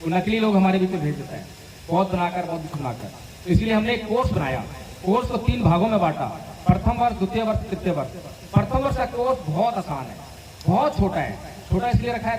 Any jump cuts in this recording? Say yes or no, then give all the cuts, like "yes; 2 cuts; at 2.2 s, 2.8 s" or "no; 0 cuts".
no; 0 cuts